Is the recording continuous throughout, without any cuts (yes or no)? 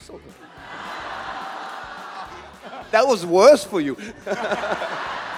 yes